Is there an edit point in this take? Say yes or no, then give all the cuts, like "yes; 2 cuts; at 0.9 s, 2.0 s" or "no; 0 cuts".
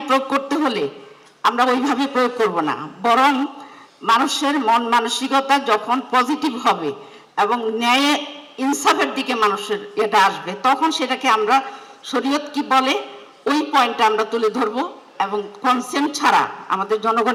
no; 0 cuts